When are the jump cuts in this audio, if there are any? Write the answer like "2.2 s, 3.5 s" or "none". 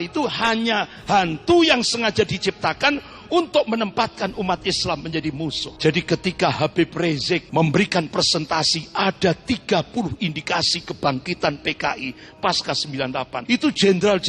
5.7 s, 7.5 s, 13.4 s